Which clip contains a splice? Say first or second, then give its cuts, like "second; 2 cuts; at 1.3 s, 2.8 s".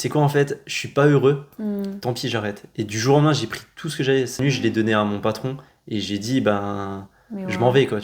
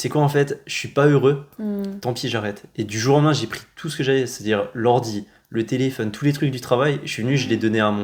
first; 1 cut; at 4.3 s